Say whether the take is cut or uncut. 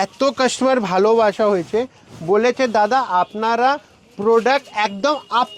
uncut